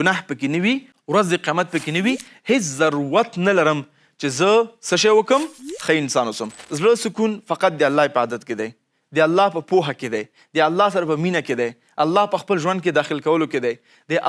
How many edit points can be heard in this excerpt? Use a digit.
1